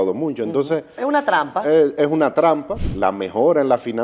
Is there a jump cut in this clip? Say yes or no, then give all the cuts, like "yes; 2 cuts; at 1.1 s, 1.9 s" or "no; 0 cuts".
yes; 1 cut; at 2.9 s